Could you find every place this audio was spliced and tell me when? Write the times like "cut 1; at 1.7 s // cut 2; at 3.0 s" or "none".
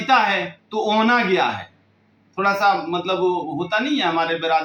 none